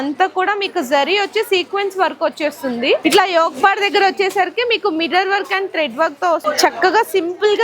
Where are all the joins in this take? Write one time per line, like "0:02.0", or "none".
0:03.0
0:06.4